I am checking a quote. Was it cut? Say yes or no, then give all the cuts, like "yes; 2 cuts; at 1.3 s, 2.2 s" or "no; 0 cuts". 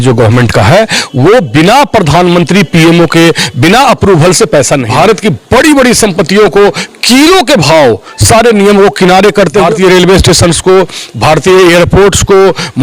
yes; 2 cuts; at 4.9 s, 9.6 s